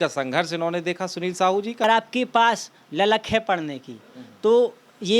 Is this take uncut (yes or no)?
no